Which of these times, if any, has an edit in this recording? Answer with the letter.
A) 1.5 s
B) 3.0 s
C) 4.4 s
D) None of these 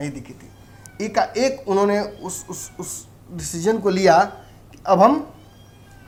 D